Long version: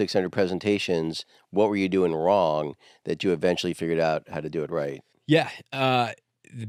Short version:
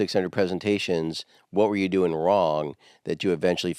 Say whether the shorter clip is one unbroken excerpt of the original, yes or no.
yes